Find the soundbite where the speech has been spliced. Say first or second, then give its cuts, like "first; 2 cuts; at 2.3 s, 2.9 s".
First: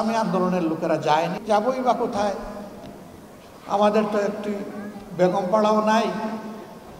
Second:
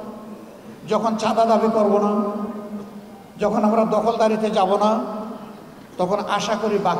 first; 1 cut; at 1.4 s